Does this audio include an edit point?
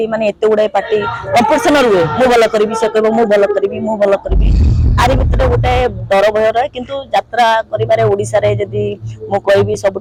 no; 0 cuts

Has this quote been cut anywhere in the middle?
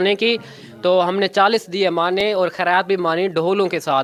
no; 0 cuts

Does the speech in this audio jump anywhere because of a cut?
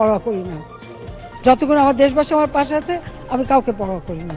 no; 0 cuts

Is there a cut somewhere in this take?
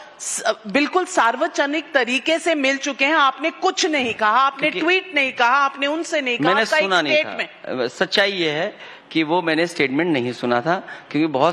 yes; 1 cut; at 2.6 s

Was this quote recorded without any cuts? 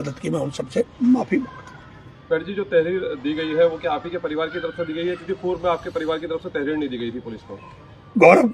yes; 0 cuts

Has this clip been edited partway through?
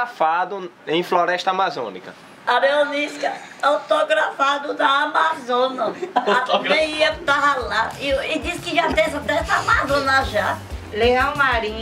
yes; 1 cut; at 10.8 s

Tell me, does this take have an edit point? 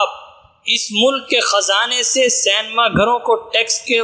no; 0 cuts

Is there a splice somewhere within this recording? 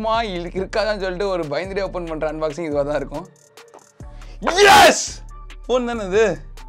no; 0 cuts

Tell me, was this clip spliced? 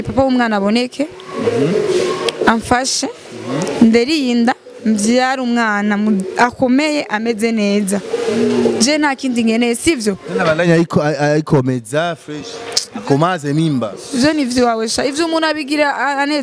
no; 0 cuts

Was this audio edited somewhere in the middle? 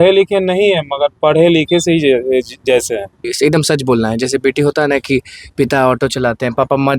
yes; 1 cut; at 3.3 s

